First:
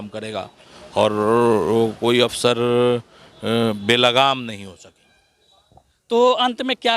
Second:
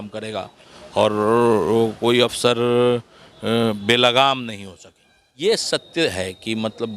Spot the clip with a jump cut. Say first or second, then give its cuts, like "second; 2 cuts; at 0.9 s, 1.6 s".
second; 1 cut; at 5.3 s